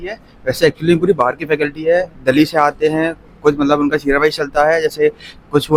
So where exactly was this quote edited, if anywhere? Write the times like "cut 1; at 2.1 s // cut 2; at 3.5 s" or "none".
none